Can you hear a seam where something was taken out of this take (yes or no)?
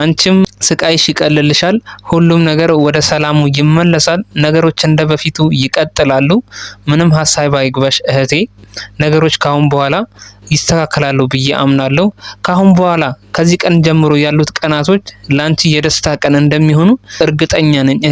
yes